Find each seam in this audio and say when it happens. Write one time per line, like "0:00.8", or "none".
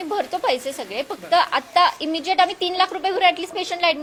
none